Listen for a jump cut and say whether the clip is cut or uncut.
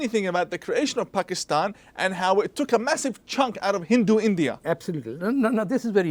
uncut